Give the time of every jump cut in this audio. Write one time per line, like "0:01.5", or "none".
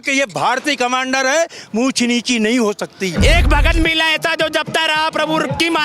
0:03.1

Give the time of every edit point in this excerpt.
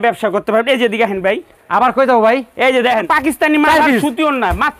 0:03.1

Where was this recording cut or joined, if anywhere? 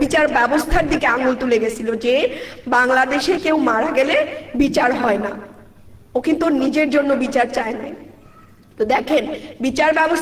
none

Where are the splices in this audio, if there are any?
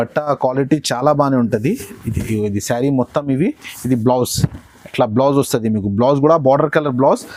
none

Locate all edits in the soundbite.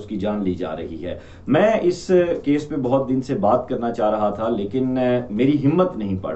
none

